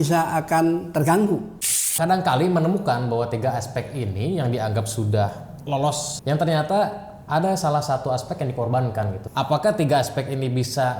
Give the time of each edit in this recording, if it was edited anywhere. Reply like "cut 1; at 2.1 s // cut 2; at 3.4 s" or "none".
cut 1; at 1.9 s // cut 2; at 6.1 s // cut 3; at 9.2 s